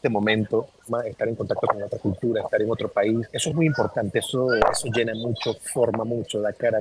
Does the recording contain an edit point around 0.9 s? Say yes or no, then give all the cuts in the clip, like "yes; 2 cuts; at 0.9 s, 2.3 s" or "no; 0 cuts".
yes; 2 cuts; at 0.9 s, 3.4 s